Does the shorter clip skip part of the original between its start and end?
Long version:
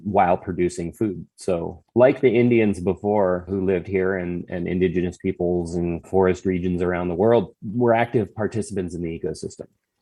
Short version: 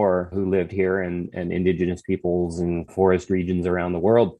no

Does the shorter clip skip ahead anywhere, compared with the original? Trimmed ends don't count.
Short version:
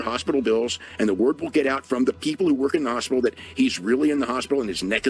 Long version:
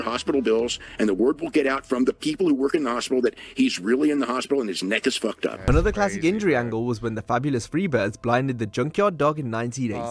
no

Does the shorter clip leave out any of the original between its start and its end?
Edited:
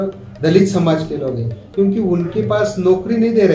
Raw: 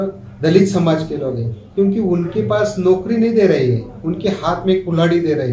no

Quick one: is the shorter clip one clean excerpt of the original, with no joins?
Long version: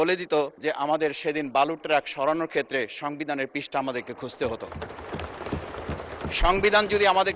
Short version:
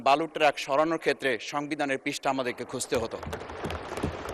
yes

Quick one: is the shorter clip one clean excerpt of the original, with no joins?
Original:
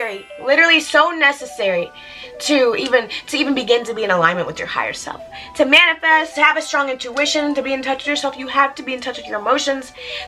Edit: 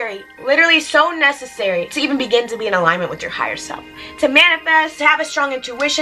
no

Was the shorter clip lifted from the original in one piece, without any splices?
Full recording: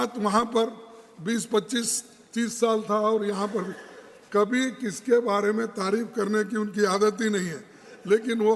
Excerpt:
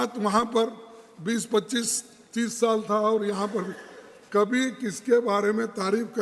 yes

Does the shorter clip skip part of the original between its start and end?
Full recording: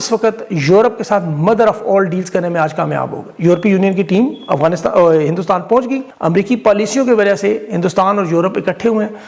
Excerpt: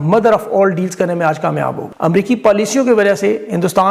yes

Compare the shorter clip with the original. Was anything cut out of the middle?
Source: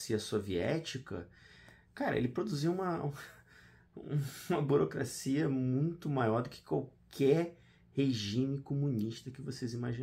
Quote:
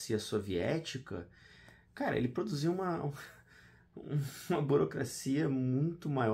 no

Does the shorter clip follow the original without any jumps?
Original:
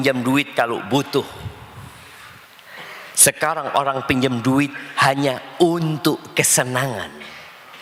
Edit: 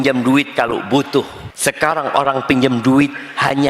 no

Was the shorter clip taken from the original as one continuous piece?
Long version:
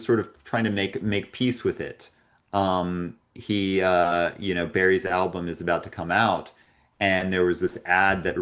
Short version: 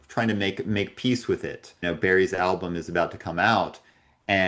no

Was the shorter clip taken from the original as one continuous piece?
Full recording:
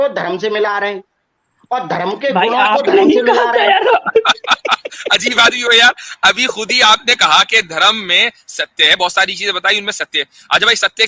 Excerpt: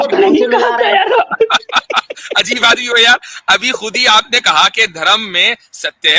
yes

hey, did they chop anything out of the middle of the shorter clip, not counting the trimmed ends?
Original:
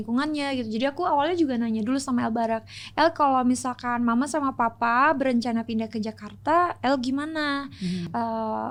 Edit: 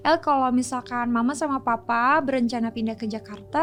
no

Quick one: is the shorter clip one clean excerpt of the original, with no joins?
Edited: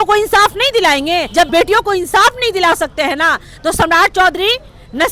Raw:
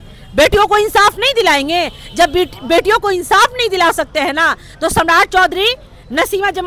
no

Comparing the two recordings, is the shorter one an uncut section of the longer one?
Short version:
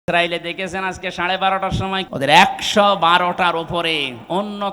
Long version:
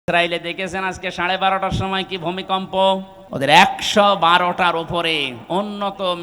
no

